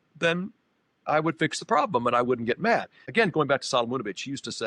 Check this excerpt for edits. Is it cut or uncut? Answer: cut